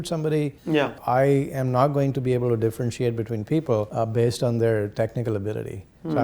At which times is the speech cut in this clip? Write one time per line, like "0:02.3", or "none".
0:01.0
0:03.9